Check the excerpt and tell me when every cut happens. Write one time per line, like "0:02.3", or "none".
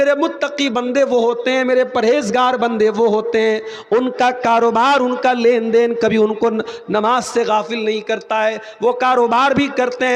none